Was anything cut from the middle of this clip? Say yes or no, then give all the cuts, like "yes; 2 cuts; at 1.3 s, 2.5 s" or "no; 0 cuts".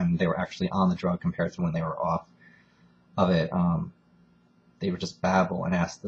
no; 0 cuts